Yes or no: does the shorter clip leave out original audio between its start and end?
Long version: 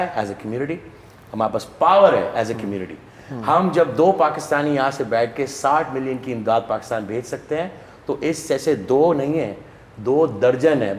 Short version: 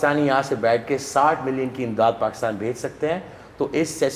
no